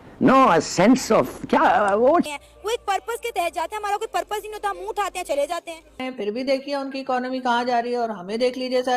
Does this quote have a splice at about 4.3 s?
no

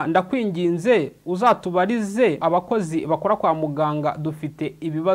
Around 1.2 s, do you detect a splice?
no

